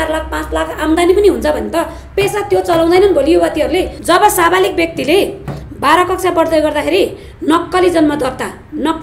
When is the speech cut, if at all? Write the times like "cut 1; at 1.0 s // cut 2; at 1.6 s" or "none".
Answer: cut 1; at 3.9 s